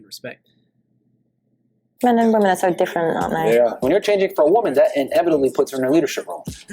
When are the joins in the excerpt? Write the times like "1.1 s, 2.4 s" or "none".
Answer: 1.8 s